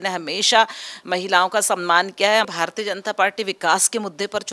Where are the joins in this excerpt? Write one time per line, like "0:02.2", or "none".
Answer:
0:02.5